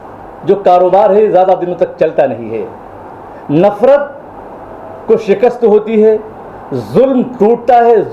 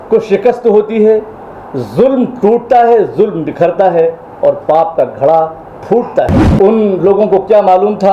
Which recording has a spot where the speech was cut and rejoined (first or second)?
second